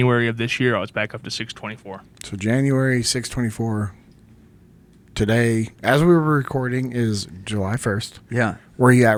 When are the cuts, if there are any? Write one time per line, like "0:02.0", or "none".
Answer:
none